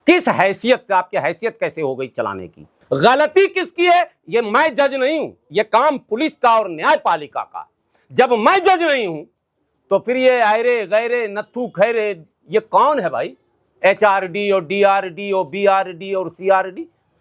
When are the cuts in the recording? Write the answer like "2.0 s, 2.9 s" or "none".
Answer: 2.8 s